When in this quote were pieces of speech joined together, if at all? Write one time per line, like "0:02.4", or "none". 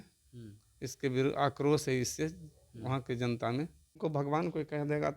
0:04.0